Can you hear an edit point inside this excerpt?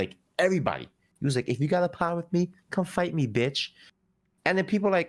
no; 0 cuts

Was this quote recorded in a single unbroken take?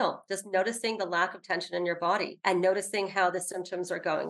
yes; 0 cuts

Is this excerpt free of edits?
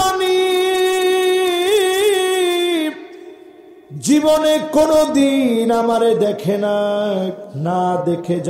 no; 1 cut; at 7.5 s

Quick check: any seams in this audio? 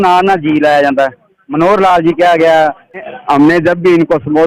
yes; 1 cut; at 3.1 s

